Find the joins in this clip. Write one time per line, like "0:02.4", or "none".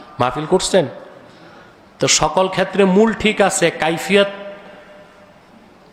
none

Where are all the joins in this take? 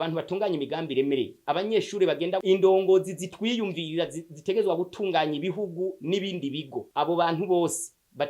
0:02.4

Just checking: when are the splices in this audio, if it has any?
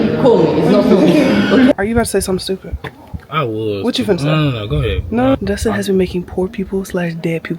0:01.7
0:05.3

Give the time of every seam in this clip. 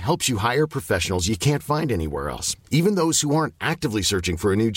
none

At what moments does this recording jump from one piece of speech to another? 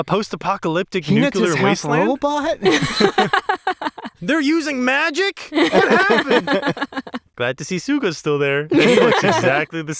0:07.2

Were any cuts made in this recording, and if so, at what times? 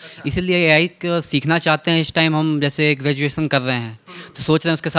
none

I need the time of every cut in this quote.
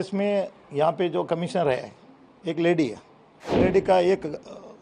0:03.6

